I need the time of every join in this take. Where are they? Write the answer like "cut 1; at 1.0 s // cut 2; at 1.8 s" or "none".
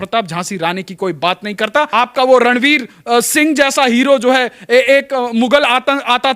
cut 1; at 1.9 s